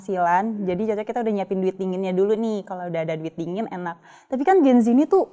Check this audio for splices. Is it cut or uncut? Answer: uncut